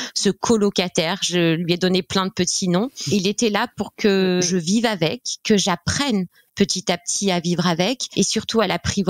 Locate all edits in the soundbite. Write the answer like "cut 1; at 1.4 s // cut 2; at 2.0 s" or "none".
cut 1; at 3.0 s // cut 2; at 4.5 s // cut 3; at 8.0 s